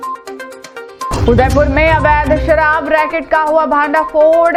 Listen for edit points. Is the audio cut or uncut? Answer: uncut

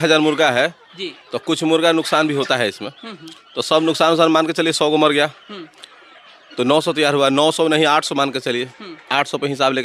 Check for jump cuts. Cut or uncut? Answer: uncut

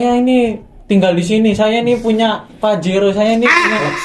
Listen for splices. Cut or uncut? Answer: uncut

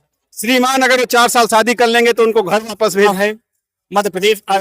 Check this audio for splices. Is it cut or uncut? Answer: cut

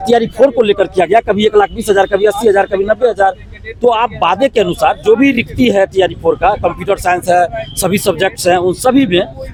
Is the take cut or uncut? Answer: uncut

